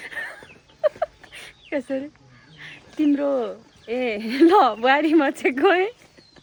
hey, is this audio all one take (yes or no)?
yes